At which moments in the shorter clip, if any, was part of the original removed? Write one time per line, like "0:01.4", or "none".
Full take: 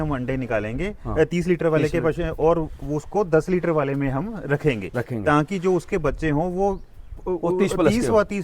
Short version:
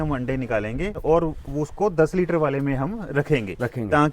0:01.0